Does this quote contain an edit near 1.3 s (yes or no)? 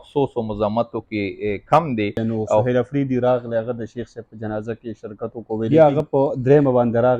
no